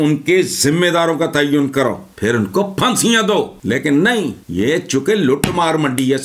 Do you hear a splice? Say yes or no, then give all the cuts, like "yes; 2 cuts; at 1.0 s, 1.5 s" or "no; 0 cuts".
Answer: yes; 3 cuts; at 2.1 s, 3.5 s, 4.4 s